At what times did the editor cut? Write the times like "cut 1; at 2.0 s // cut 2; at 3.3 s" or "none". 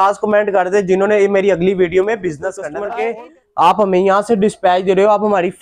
cut 1; at 2.7 s